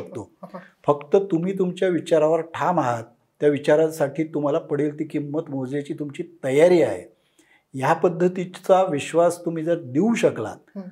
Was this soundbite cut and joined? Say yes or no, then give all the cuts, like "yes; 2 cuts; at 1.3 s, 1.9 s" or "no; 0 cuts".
no; 0 cuts